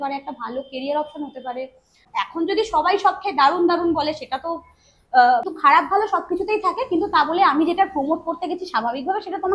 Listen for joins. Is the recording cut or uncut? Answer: cut